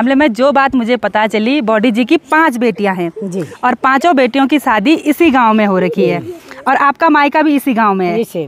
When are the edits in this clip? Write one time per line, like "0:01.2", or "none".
none